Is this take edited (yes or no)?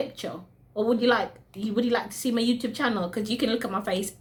no